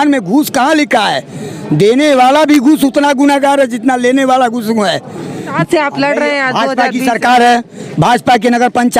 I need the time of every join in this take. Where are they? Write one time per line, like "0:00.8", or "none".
0:05.6